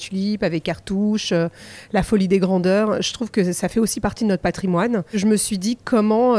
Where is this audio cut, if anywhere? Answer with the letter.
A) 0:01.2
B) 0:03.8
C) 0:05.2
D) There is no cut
C